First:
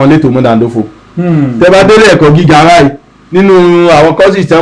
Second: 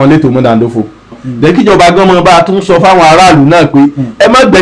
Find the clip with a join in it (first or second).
second